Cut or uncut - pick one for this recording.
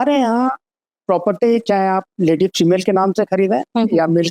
uncut